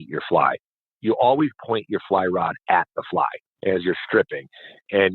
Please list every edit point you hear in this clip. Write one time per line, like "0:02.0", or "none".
0:00.9
0:03.5